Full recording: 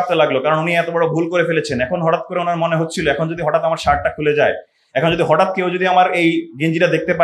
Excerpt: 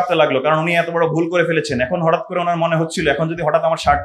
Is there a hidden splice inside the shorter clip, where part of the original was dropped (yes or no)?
no